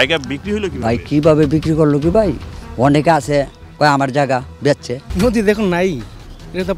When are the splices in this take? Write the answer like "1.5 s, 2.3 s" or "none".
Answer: 5.1 s